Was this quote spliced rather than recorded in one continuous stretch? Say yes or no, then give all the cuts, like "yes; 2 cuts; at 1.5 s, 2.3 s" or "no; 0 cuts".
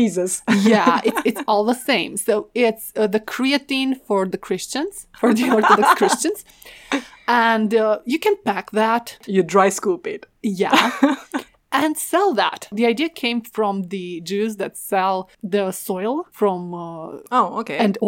no; 0 cuts